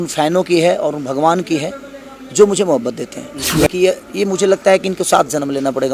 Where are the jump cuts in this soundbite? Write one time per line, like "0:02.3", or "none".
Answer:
0:03.5